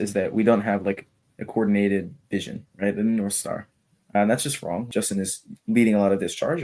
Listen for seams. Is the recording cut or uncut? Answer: cut